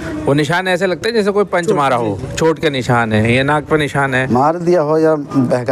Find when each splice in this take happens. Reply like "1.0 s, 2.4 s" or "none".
4.2 s